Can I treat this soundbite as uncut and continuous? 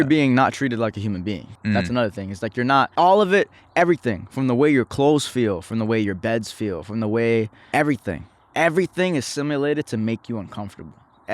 no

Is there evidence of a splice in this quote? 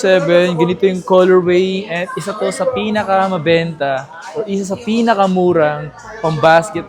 no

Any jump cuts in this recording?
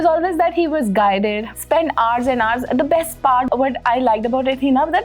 yes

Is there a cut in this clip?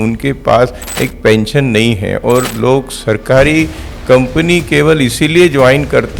no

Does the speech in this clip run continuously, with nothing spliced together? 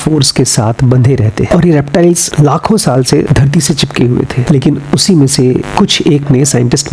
no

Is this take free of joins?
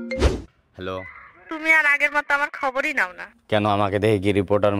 no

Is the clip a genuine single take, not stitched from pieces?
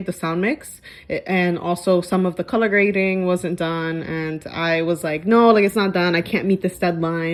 yes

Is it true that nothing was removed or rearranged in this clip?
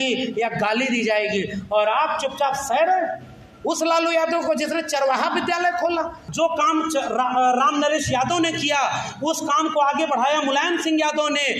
no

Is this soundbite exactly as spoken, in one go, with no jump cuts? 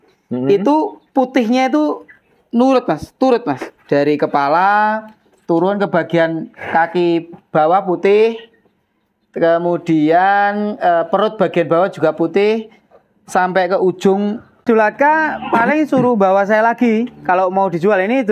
no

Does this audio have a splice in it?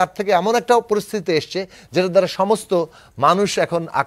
no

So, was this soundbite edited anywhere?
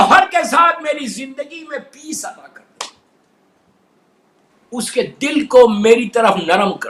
no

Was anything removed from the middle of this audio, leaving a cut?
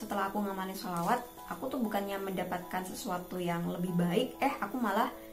no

